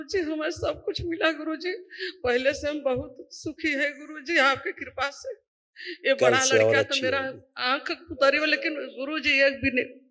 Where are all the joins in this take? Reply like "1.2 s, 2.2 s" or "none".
none